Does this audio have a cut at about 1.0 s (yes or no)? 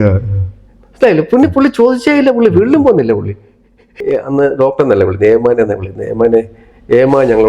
no